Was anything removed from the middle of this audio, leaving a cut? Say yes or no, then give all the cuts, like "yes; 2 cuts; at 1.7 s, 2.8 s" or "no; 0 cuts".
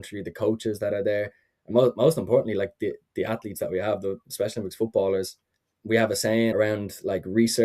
yes; 2 cuts; at 5.7 s, 6.5 s